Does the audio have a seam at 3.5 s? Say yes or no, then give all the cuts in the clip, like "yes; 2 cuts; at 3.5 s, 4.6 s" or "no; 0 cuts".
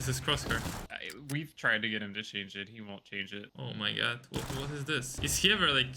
yes; 3 cuts; at 0.9 s, 3.5 s, 5.1 s